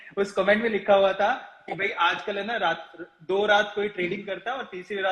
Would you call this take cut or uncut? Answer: uncut